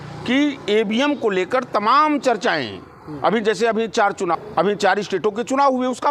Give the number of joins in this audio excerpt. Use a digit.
1